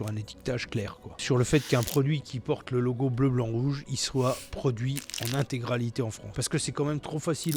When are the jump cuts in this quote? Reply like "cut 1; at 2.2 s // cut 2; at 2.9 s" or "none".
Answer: cut 1; at 1.2 s // cut 2; at 6.3 s